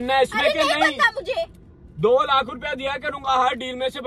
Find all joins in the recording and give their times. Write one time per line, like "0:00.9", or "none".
none